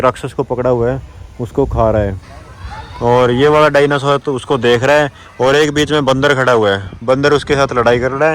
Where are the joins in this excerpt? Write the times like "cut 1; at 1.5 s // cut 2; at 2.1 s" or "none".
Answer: none